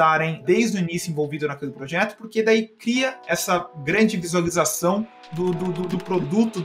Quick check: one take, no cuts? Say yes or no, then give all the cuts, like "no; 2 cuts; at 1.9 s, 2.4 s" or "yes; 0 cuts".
yes; 0 cuts